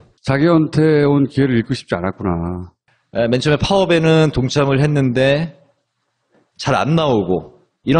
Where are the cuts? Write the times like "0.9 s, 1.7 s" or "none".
2.4 s